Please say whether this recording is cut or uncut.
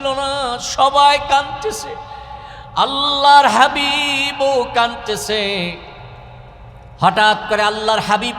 uncut